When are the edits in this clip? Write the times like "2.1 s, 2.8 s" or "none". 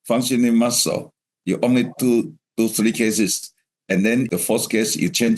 4.3 s

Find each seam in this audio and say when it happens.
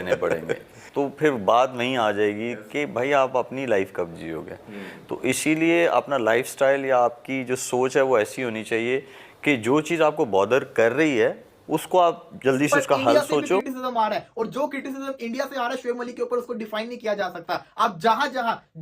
13.7 s

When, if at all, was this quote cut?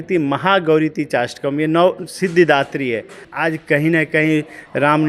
3.3 s

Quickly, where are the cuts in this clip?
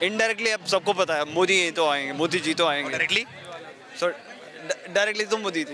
none

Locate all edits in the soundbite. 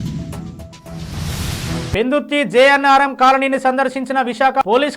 1.9 s

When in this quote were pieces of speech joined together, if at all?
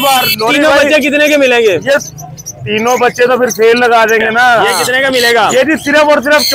4.8 s

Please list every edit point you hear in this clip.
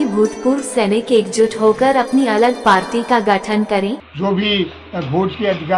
4.1 s

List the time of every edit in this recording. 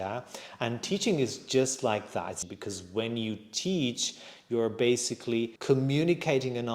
2.4 s, 5.6 s

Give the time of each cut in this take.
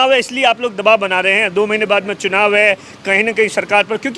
none

